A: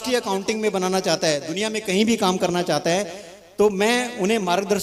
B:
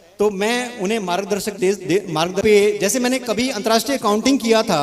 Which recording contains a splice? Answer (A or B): B